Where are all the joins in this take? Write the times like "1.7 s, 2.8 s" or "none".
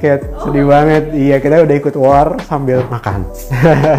2.9 s